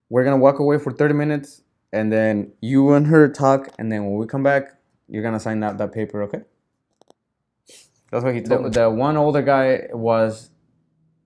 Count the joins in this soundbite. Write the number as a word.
one